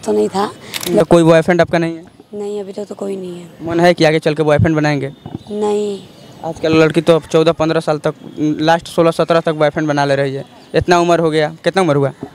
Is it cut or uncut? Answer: cut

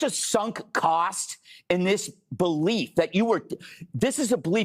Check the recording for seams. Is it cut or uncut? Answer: uncut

